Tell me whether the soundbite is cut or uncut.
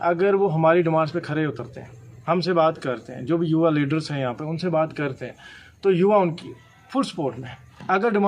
uncut